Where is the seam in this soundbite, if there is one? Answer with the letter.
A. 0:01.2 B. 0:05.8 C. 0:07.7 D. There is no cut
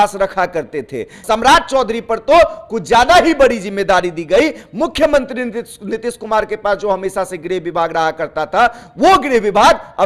A